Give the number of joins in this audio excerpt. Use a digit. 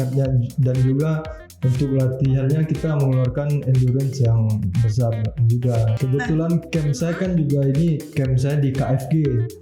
1